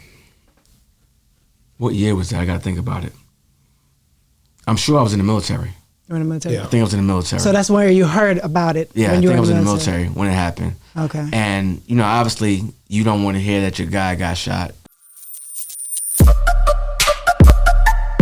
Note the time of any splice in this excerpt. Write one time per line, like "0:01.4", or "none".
0:14.8